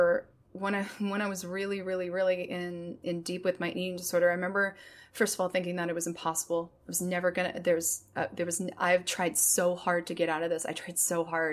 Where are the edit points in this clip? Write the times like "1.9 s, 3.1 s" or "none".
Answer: 3.0 s